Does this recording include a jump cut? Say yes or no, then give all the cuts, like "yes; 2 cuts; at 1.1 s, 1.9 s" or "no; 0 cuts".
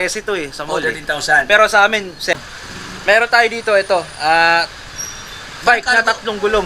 yes; 1 cut; at 2.4 s